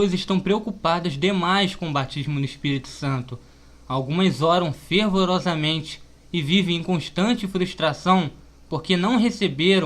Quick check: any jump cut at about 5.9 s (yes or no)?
yes